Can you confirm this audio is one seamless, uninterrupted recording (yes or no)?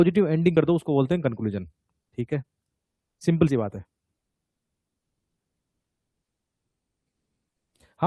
yes